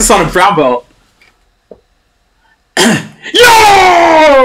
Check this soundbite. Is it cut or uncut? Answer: uncut